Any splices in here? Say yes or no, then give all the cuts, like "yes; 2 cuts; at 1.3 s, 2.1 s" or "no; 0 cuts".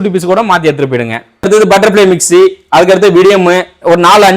yes; 1 cut; at 1.4 s